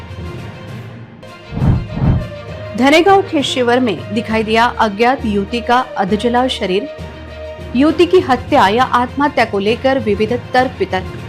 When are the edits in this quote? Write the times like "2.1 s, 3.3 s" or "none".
1.1 s